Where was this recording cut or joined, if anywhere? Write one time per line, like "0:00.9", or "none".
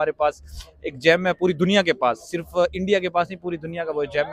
none